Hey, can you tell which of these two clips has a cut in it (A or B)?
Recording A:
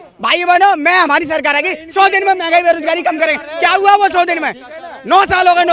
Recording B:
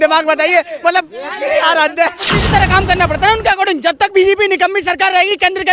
B